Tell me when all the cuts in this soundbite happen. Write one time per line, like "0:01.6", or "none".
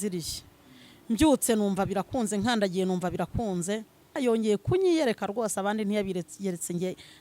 0:04.1